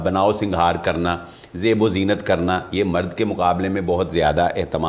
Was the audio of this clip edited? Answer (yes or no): no